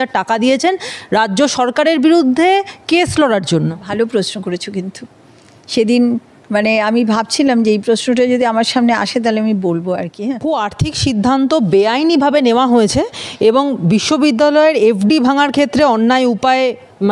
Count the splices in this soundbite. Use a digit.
1